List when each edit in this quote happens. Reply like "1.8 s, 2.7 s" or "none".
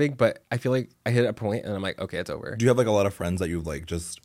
2.5 s